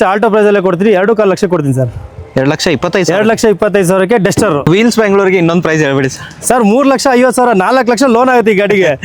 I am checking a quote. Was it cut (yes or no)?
yes